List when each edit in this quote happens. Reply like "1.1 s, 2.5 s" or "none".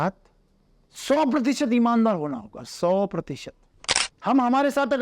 4.1 s